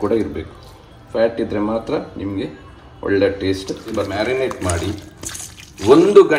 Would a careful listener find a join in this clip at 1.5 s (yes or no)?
no